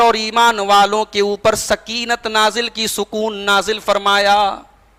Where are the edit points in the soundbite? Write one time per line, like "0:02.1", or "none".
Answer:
none